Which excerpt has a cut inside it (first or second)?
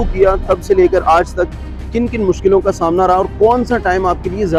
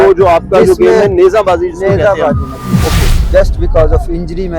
second